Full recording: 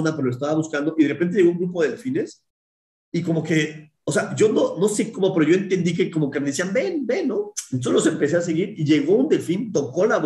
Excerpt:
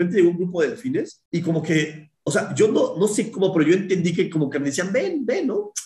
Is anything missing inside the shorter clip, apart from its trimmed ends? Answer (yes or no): yes